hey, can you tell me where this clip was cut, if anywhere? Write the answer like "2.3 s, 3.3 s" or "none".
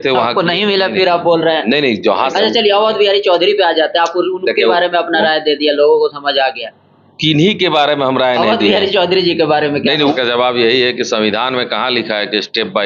2.3 s, 10.1 s